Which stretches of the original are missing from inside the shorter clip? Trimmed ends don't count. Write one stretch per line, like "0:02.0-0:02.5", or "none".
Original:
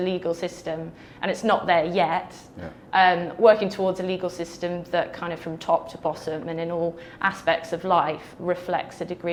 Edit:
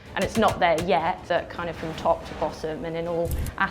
0:02.3-0:04.8